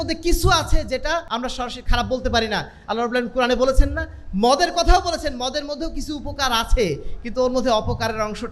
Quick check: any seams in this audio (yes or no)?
yes